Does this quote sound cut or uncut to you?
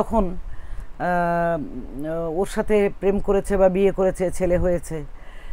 uncut